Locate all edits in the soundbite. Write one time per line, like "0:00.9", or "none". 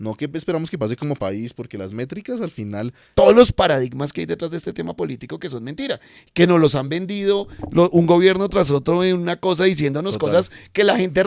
0:03.0